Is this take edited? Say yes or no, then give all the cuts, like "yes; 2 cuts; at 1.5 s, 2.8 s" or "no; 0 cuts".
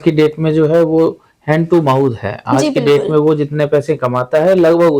no; 0 cuts